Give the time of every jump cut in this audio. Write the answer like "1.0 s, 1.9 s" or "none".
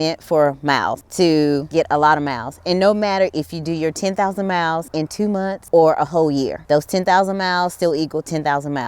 1.0 s, 1.7 s, 5.2 s, 6.6 s